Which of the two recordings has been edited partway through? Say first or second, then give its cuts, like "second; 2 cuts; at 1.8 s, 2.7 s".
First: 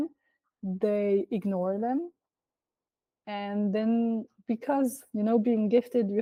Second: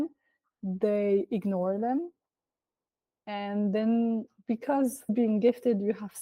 second; 1 cut; at 5.1 s